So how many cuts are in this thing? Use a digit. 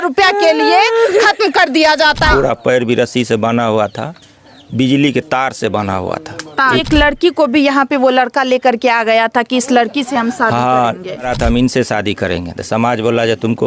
3